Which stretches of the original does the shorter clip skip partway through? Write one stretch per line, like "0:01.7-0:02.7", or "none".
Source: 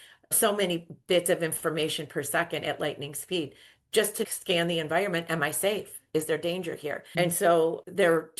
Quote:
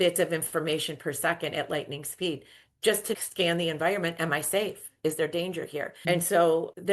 none